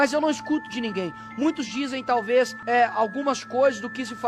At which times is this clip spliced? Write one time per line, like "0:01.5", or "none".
0:02.4